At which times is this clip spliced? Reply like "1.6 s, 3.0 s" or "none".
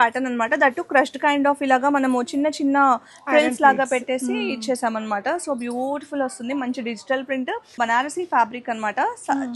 7.8 s